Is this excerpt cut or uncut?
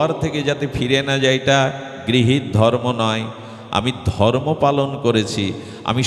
uncut